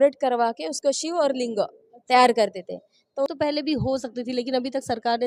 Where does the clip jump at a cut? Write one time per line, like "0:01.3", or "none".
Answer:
0:03.3